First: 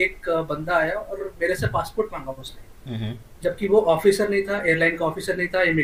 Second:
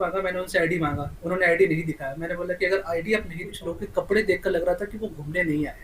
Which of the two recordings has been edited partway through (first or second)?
second